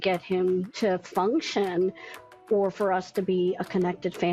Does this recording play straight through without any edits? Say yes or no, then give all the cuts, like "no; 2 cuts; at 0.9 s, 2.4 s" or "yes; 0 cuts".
yes; 0 cuts